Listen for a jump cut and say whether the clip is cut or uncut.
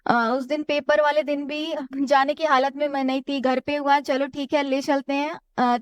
uncut